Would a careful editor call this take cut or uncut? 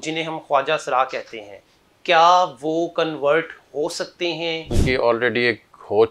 cut